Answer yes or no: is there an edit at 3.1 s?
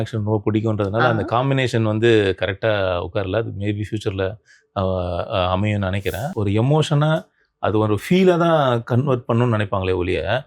no